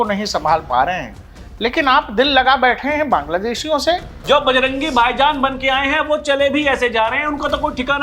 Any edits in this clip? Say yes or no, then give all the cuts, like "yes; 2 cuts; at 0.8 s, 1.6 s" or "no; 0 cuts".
yes; 1 cut; at 4.1 s